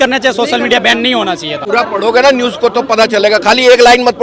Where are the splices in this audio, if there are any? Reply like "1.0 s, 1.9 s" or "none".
1.6 s